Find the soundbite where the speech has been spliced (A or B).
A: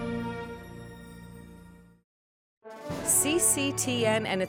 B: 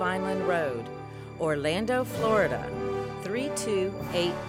A